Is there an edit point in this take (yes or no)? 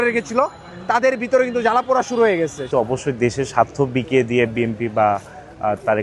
yes